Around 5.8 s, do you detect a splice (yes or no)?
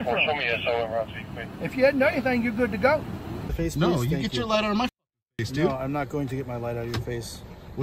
no